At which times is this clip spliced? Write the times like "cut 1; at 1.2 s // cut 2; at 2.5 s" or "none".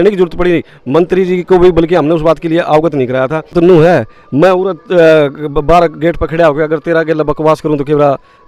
cut 1; at 3.5 s